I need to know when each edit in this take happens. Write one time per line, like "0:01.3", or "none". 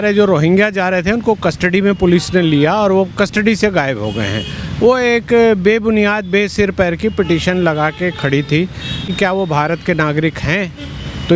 0:09.1